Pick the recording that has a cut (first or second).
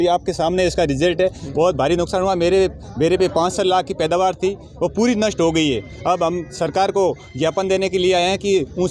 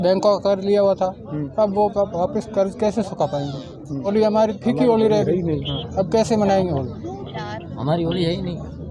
second